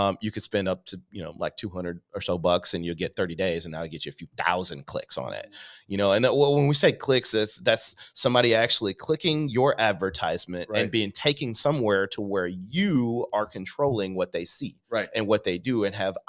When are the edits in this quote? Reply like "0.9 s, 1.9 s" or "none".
none